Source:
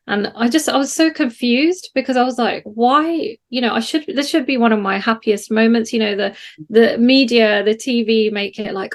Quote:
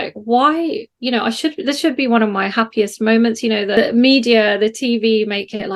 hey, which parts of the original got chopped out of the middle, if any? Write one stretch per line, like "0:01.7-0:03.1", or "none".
0:06.3-0:06.8